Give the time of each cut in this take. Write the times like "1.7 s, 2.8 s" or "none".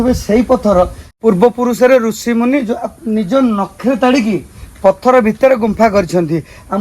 1.1 s